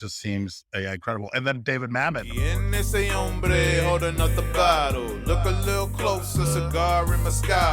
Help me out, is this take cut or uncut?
cut